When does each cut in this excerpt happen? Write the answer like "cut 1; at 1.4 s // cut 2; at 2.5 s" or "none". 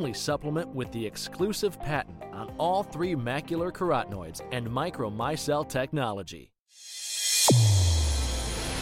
cut 1; at 6.7 s

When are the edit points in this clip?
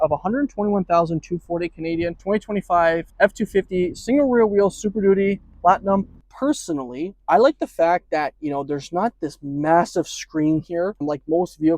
cut 1; at 2.2 s // cut 2; at 3.1 s // cut 3; at 6.2 s // cut 4; at 11.0 s

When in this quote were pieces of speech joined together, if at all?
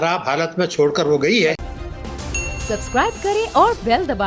cut 1; at 1.6 s

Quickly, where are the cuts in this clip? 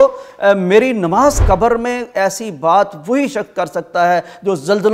cut 1; at 1.4 s

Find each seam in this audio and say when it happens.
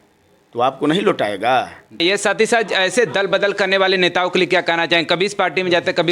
cut 1; at 2.0 s

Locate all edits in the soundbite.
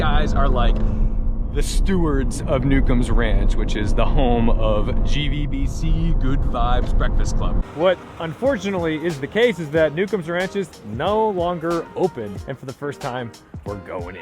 cut 1; at 7.6 s // cut 2; at 12.3 s

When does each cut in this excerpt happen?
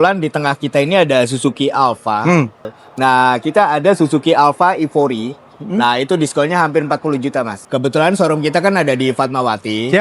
cut 1; at 2.7 s // cut 2; at 7.6 s

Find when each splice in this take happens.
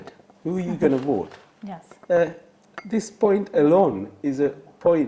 none

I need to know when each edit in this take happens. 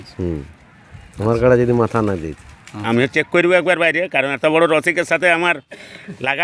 cut 1; at 2.7 s

